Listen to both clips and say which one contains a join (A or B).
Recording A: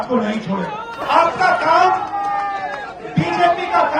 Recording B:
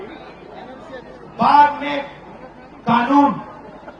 A